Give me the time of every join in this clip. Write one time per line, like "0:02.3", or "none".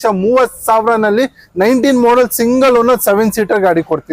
none